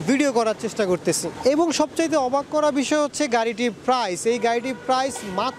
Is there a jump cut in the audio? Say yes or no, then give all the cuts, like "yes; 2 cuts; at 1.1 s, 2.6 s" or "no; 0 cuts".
yes; 1 cut; at 1.3 s